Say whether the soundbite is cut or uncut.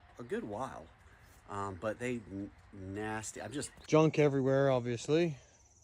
cut